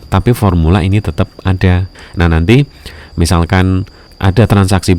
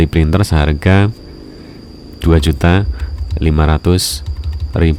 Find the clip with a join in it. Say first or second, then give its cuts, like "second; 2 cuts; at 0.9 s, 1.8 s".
first; 2 cuts; at 1.9 s, 4.1 s